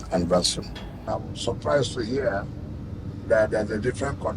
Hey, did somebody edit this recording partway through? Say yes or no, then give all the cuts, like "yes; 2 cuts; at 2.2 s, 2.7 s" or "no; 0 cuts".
yes; 1 cut; at 0.9 s